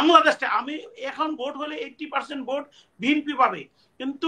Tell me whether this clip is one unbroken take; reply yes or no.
yes